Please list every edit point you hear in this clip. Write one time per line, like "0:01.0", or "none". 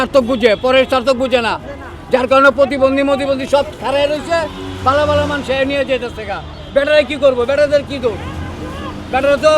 none